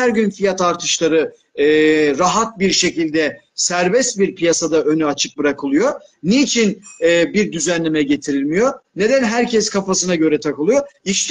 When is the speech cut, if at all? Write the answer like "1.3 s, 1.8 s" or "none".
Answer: none